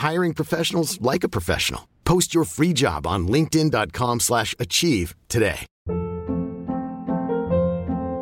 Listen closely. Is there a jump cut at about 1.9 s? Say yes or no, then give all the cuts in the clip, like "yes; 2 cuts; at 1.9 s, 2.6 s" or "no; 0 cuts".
no; 1 cut; at 5.7 s